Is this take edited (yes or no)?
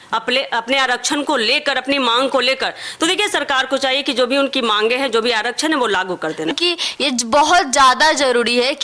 yes